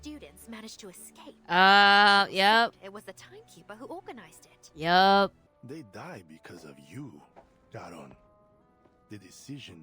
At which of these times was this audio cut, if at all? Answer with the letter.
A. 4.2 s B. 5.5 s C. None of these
B